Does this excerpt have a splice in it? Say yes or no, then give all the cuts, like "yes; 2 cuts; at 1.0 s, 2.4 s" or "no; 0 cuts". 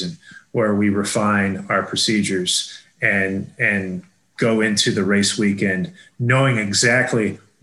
no; 0 cuts